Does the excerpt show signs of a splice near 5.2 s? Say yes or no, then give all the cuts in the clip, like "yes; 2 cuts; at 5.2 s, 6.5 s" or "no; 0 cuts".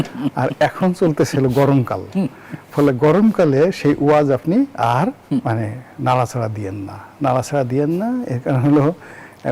yes; 1 cut; at 5.2 s